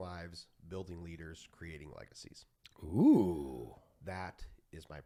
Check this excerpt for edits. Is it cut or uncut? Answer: uncut